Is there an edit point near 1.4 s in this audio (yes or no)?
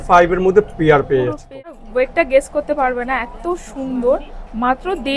yes